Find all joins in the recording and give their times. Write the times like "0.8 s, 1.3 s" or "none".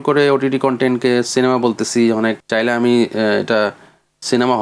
none